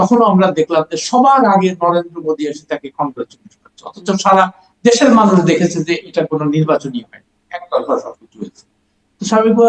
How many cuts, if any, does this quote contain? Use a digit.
0